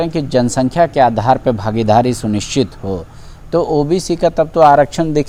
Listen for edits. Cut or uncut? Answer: uncut